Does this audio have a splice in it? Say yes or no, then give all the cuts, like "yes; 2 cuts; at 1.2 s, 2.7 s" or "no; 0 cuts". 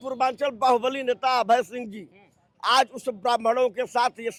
no; 0 cuts